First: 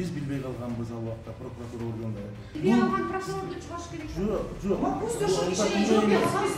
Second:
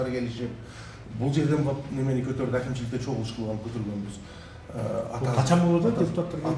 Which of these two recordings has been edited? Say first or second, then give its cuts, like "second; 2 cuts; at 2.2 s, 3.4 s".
first; 1 cut; at 2.5 s